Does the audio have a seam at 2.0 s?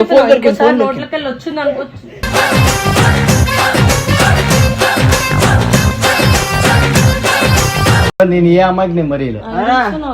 no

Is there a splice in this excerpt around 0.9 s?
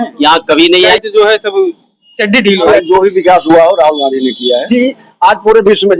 yes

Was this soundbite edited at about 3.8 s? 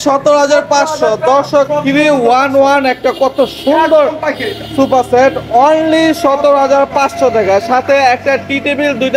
no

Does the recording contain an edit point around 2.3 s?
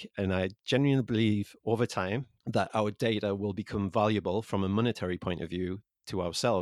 yes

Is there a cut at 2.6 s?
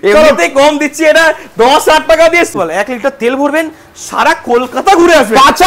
yes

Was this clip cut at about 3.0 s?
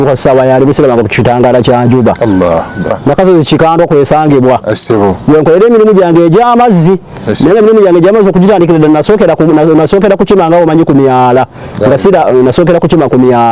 yes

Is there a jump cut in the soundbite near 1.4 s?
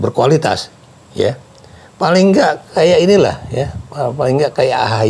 no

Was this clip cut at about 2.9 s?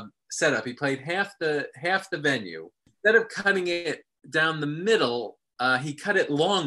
yes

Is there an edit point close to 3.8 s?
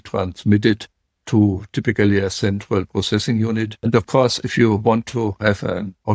yes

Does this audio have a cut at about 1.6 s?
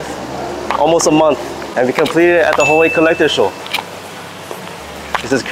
yes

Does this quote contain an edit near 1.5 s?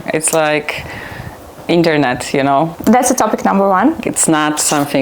no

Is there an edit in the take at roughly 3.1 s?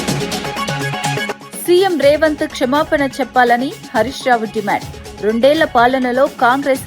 no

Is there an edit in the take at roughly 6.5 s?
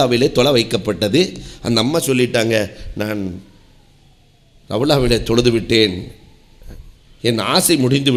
no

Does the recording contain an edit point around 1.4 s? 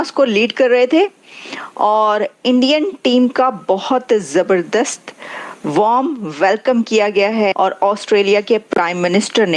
no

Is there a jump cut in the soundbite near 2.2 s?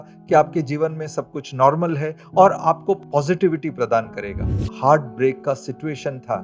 no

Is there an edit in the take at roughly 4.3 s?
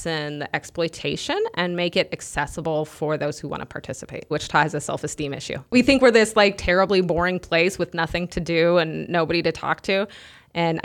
yes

